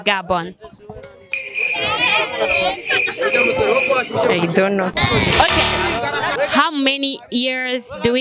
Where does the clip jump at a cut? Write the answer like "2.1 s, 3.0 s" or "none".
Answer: 6.3 s